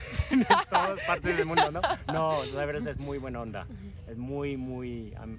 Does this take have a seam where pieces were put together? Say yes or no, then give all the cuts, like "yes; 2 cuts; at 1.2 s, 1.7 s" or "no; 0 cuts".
no; 0 cuts